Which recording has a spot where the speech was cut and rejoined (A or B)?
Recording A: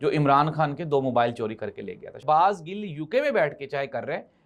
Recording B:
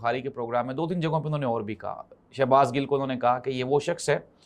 A